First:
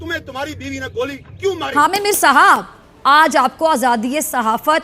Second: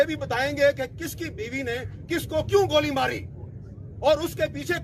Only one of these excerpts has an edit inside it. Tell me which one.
first; 1 cut; at 1.6 s

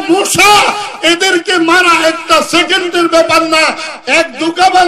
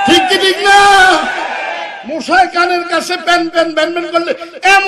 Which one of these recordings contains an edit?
first; 1 cut; at 3.9 s

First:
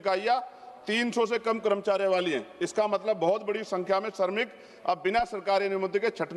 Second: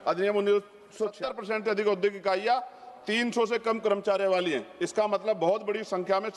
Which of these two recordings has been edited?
second; 1 cut; at 1.1 s

